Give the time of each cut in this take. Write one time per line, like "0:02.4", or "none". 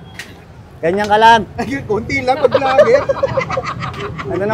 none